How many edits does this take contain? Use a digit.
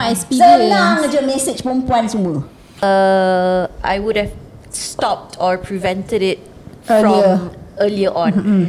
1